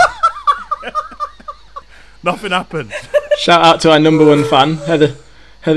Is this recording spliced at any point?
no; 0 cuts

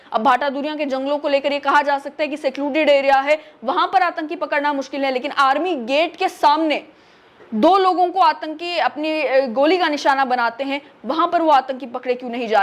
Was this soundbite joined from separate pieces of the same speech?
no; 0 cuts

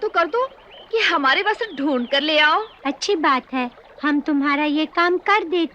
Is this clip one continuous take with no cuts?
no; 1 cut; at 2.7 s

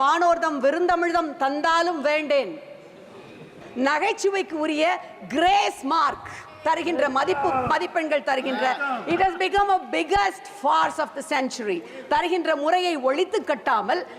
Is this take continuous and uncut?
no; 1 cut; at 3.6 s

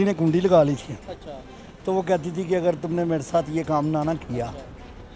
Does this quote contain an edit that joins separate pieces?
no; 0 cuts

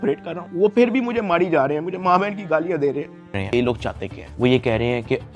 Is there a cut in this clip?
yes; 1 cut; at 3.4 s

